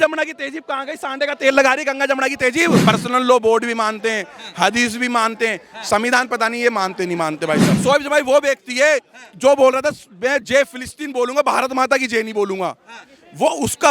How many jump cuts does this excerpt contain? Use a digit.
2